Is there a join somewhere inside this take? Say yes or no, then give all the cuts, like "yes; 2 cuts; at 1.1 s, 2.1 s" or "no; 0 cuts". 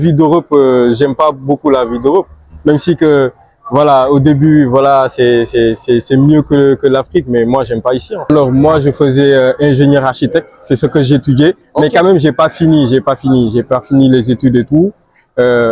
yes; 1 cut; at 8.3 s